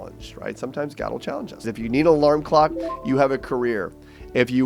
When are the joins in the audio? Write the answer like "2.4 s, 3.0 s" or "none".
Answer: 1.7 s